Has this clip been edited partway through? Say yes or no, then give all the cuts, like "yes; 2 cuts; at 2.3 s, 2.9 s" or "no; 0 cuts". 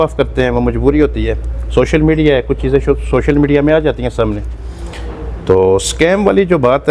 no; 0 cuts